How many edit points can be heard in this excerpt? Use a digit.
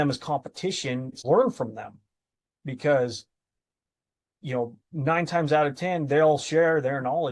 1